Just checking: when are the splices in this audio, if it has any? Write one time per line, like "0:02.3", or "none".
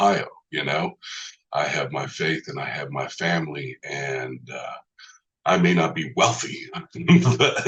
none